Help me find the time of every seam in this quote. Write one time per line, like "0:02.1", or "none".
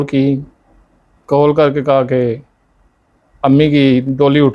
none

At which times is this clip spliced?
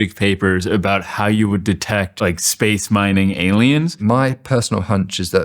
0:02.1
0:04.0

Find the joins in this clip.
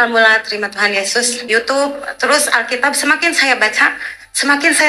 0:01.5

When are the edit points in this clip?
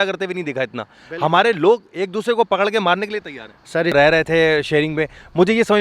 0:03.9

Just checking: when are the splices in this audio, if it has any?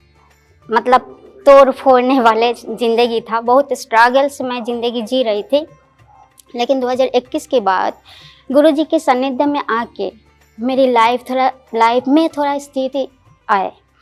none

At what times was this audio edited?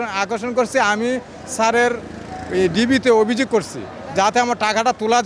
none

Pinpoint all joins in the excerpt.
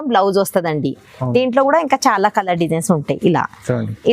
none

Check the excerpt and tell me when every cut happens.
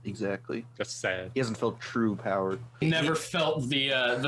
0:02.8

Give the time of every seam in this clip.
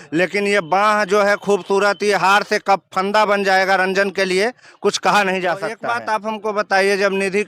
0:05.9

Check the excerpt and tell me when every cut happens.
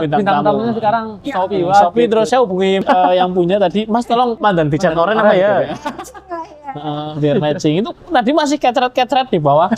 0:01.2
0:02.6
0:04.4

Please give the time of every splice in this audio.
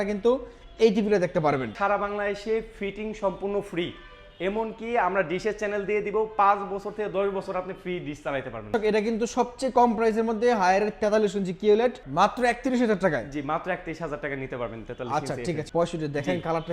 0:01.8
0:08.7
0:12.0
0:15.6

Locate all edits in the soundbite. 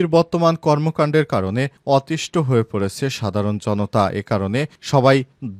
none

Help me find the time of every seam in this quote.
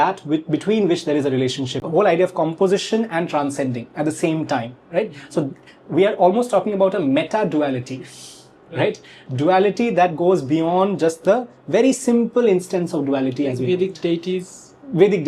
0:01.8

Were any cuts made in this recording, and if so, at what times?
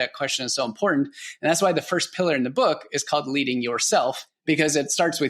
0:04.3

